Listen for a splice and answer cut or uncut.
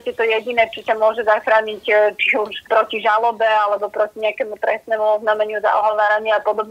cut